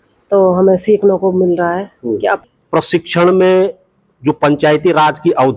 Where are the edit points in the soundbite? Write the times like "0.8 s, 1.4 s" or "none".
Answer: 2.4 s